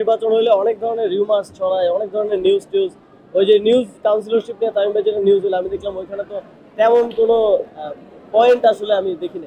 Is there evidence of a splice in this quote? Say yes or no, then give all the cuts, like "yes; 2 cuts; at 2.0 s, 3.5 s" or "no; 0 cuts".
no; 0 cuts